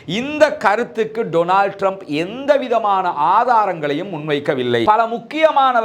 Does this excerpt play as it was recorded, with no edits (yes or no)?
no